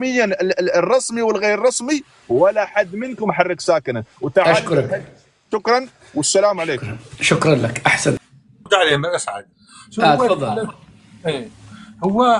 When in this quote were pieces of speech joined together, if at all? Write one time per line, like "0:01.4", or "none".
0:08.2